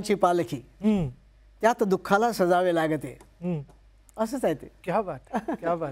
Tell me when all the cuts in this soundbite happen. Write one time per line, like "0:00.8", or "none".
none